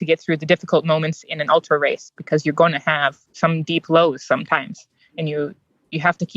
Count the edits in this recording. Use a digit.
1